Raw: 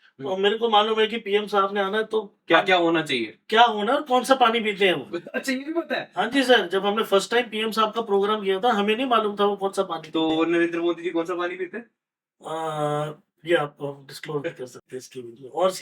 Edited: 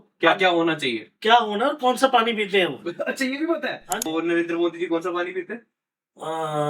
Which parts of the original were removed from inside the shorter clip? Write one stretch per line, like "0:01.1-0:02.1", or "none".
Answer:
0:06.3-0:10.3